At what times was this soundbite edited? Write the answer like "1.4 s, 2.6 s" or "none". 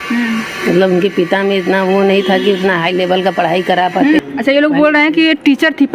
4.2 s